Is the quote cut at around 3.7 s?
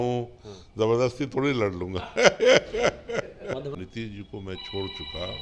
yes; 1 cut; at 3.7 s

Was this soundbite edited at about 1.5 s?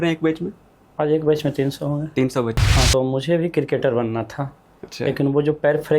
no; 1 cut; at 2.9 s

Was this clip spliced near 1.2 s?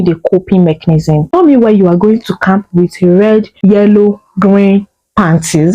yes; 2 cuts; at 1.2 s, 3.5 s

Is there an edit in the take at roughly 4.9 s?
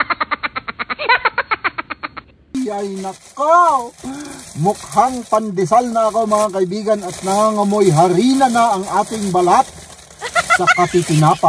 no; 2 cuts; at 2.5 s, 7.0 s

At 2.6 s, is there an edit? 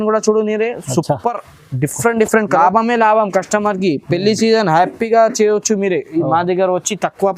yes; 1 cut; at 2.6 s

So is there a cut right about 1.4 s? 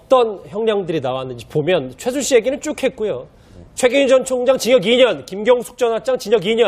yes; 1 cut; at 1.4 s

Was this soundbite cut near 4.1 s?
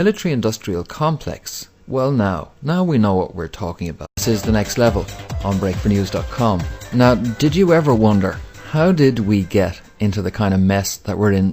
no; 0 cuts

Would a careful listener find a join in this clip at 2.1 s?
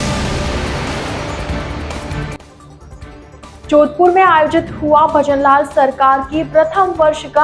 yes; 1 cut; at 2.1 s

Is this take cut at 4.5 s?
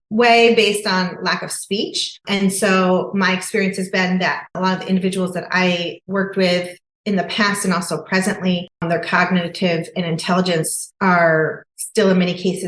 yes; 2 cuts; at 4.5 s, 8.8 s

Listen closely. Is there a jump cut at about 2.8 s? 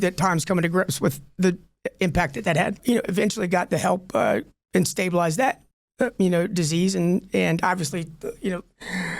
yes; 1 cut; at 2.8 s

